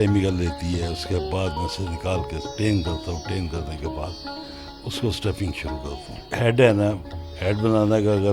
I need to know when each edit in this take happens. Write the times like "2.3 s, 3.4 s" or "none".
6.3 s